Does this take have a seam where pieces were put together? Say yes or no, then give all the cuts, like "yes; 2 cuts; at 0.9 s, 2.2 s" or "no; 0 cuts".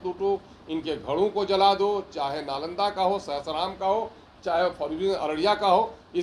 no; 0 cuts